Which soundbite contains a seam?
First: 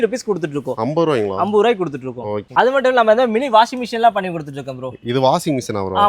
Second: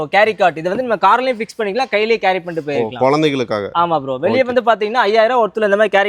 first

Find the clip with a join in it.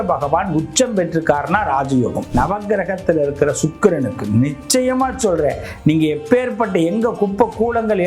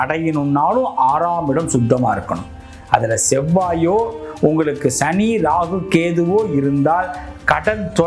first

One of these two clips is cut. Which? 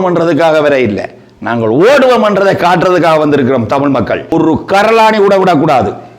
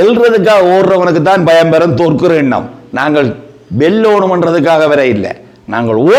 first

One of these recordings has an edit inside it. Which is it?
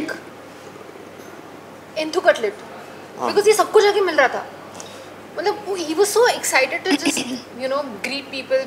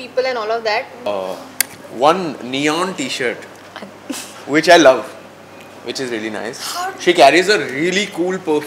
second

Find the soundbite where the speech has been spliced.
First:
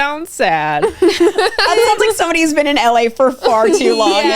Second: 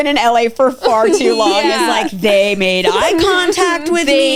first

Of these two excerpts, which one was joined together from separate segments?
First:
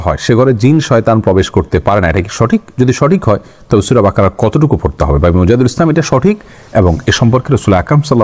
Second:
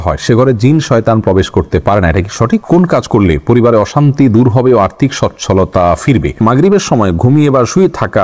second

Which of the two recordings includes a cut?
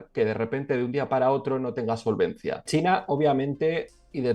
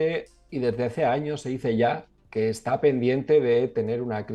first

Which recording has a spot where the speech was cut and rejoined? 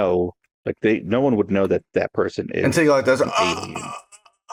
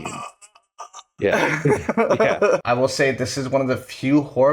second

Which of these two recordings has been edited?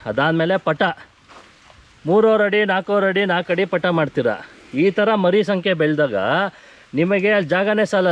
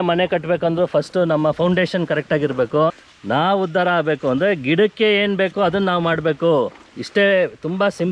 second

